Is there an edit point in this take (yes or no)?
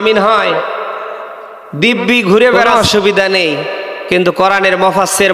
yes